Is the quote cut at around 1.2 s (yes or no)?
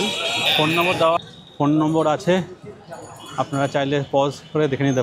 yes